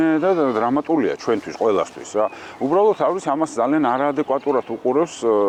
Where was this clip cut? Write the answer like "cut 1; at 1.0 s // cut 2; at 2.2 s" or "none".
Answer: none